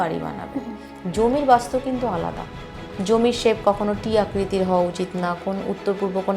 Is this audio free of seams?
no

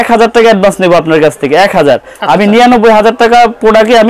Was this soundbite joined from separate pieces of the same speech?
no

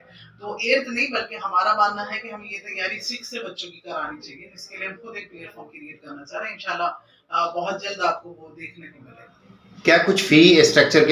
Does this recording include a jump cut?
yes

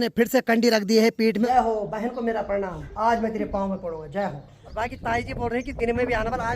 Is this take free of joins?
no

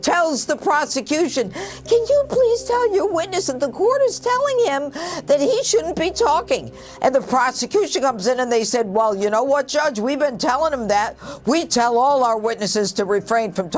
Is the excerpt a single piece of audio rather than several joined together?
no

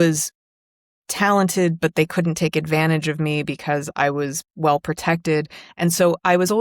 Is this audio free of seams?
yes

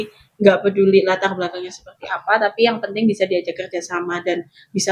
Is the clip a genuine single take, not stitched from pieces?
yes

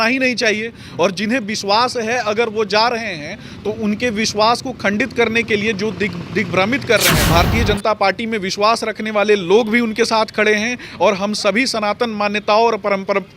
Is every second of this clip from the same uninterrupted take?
no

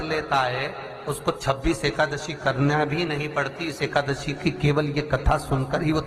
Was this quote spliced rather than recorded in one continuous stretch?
no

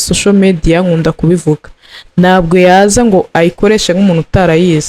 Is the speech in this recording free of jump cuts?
yes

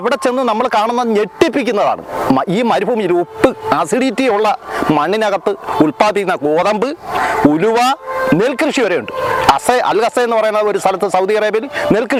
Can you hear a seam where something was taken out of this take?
no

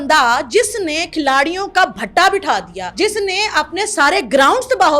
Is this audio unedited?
no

